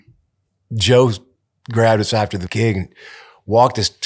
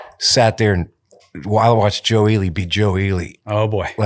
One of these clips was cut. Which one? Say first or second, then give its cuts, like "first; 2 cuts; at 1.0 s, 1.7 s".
first; 1 cut; at 2.4 s